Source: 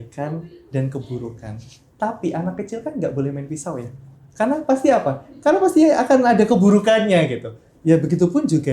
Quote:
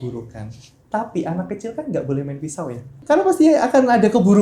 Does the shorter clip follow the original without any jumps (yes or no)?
no